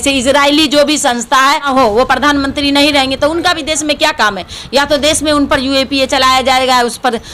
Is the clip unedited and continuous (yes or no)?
no